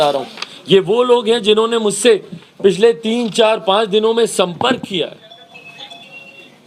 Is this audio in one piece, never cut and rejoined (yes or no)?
yes